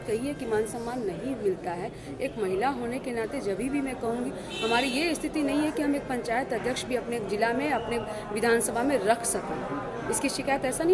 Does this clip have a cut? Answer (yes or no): no